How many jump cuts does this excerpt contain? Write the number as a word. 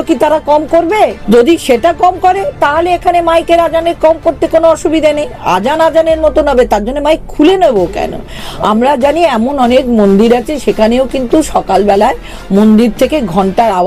one